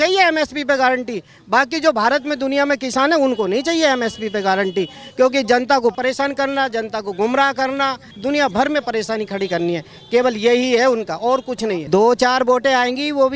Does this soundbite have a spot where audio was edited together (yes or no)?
yes